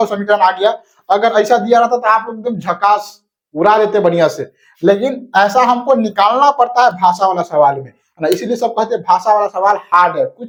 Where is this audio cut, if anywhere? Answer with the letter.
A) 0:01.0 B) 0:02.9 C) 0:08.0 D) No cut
D